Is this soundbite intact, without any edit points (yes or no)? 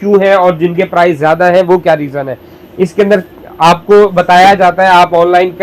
yes